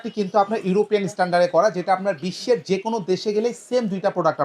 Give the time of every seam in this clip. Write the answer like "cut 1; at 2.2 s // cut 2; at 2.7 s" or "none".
none